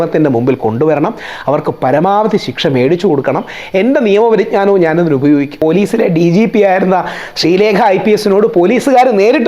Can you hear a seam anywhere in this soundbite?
yes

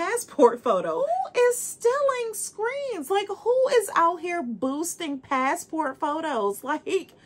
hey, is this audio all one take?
no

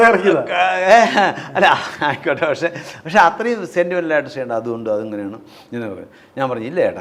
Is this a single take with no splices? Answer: yes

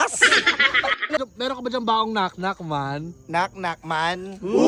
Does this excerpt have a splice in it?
yes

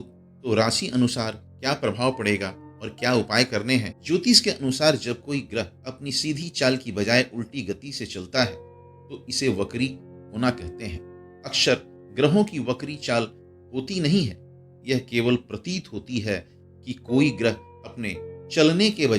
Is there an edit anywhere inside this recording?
yes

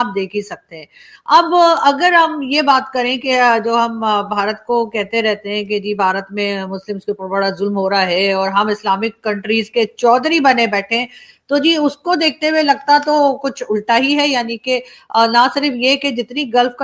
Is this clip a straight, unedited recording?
yes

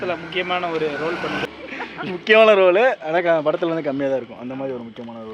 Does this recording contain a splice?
yes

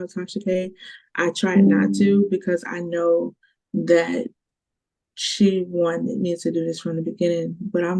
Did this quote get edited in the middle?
no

